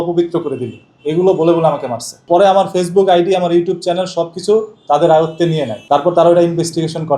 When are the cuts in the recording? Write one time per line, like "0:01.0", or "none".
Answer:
0:02.2
0:05.7